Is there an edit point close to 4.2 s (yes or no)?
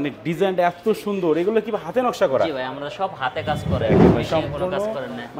no